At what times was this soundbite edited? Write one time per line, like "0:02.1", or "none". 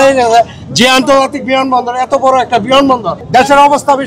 0:03.2